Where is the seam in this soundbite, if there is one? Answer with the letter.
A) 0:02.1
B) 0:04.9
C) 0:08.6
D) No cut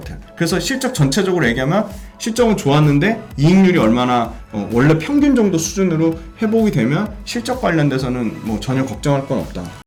D